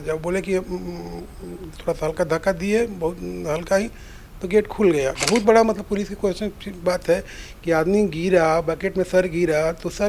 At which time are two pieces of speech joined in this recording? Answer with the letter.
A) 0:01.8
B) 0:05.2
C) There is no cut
B